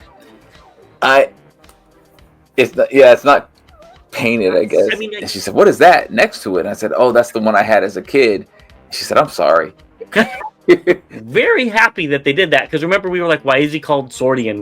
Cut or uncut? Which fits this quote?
cut